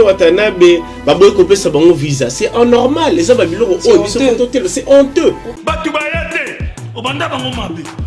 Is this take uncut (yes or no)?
no